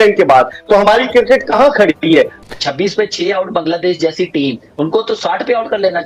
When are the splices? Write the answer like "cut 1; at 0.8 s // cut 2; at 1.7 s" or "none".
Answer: cut 1; at 2.3 s